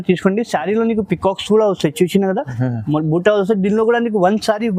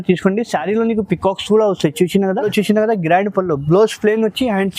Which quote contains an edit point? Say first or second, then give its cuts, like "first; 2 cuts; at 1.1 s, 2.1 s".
second; 1 cut; at 2.5 s